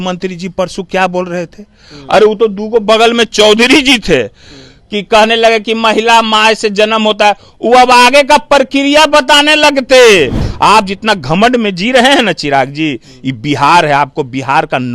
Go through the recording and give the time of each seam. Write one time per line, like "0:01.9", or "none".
0:10.4